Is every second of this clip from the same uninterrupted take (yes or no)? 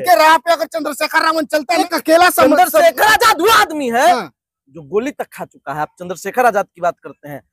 no